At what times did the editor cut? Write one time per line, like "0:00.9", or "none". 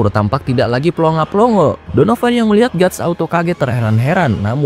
0:01.8